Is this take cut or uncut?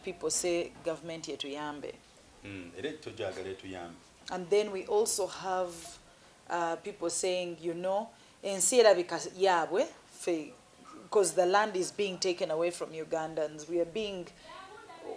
uncut